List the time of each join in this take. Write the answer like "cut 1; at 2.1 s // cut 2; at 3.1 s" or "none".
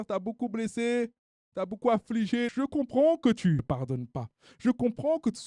cut 1; at 2.5 s // cut 2; at 3.6 s